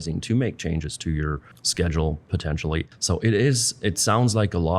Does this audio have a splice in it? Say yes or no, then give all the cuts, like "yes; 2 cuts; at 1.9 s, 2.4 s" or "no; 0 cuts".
yes; 1 cut; at 2.9 s